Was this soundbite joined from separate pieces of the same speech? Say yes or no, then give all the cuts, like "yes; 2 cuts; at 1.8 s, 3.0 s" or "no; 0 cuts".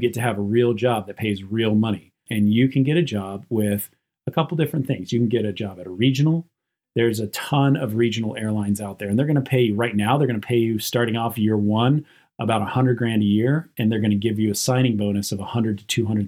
yes; 2 cuts; at 2.2 s, 6.7 s